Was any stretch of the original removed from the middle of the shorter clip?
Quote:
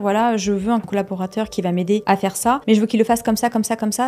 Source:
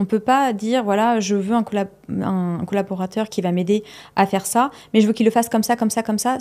yes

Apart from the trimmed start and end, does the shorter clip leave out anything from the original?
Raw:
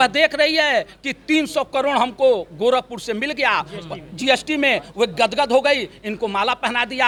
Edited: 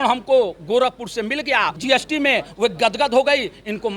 yes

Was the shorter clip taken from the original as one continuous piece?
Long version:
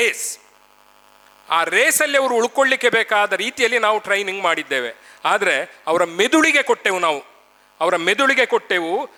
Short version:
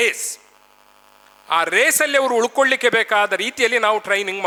yes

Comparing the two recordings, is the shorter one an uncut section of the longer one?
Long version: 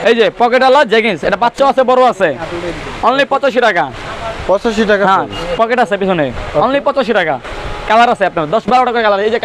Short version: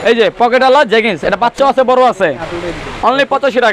yes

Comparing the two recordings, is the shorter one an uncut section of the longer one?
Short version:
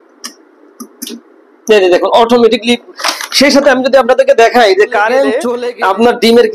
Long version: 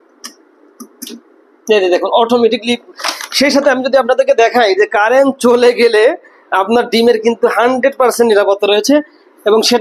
no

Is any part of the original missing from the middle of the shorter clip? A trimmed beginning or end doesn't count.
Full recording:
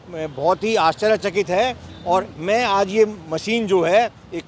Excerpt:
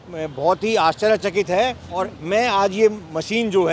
yes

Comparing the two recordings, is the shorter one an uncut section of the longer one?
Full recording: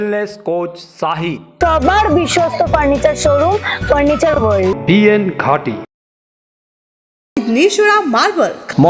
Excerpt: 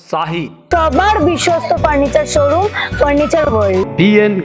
yes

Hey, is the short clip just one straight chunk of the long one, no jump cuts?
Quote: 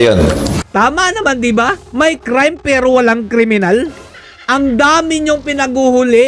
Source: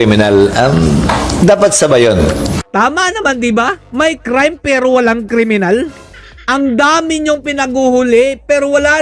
yes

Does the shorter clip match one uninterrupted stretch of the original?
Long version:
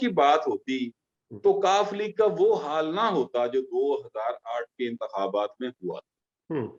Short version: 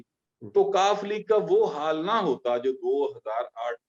yes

